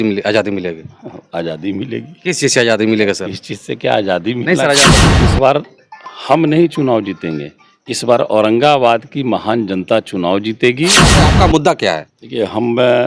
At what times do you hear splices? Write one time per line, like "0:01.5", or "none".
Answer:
0:04.9
0:11.3